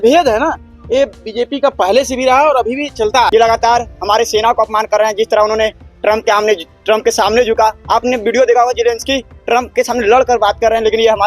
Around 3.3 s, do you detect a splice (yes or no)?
yes